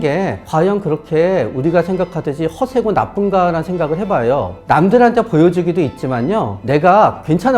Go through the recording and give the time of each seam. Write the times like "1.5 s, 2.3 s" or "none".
none